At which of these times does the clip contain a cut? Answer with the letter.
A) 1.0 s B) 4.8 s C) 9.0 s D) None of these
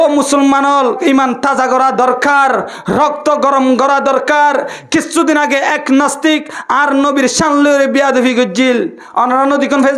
A